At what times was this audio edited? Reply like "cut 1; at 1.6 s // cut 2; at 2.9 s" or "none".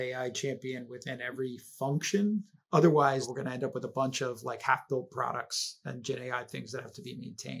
cut 1; at 2.6 s // cut 2; at 3.3 s